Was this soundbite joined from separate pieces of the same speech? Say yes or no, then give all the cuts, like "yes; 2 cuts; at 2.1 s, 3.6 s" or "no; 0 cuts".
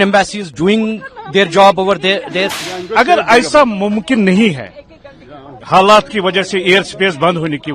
yes; 1 cut; at 2.6 s